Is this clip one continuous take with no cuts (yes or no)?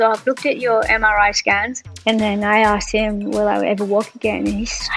no